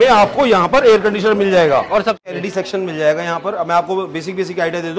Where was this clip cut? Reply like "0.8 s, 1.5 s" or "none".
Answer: 2.2 s